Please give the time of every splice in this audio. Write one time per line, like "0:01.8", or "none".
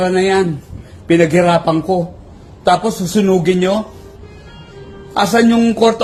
none